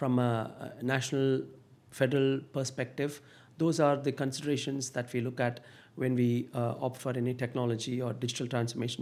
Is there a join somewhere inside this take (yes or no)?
no